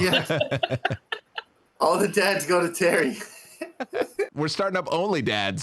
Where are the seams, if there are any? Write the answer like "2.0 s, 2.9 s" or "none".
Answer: 4.3 s